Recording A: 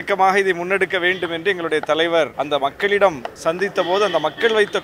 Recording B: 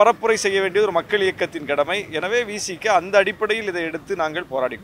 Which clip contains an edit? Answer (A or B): A